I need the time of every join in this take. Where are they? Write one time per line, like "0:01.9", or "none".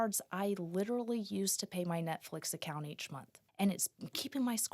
0:03.4